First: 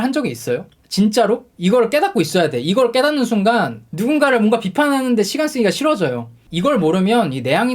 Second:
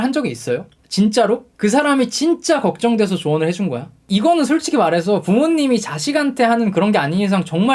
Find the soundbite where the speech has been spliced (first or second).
first